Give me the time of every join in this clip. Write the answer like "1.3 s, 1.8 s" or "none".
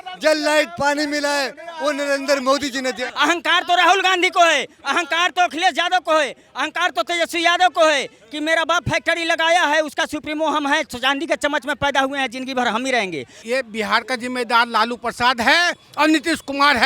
3.0 s, 13.3 s